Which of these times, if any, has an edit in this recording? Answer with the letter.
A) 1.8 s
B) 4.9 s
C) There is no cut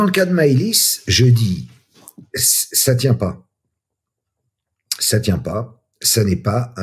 C